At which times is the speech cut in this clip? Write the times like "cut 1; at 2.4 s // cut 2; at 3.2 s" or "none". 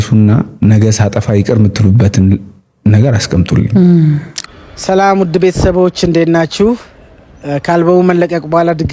cut 1; at 4.4 s